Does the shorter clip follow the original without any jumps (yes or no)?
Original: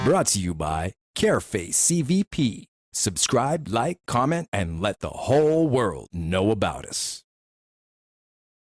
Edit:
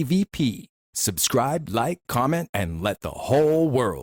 yes